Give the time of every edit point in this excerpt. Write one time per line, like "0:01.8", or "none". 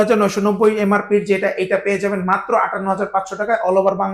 none